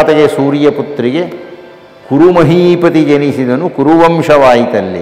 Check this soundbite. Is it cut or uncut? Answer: uncut